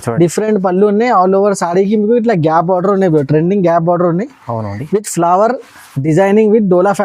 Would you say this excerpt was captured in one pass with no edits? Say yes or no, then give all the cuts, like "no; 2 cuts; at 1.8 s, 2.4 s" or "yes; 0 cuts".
yes; 0 cuts